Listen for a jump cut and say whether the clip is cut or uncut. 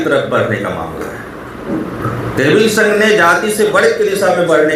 uncut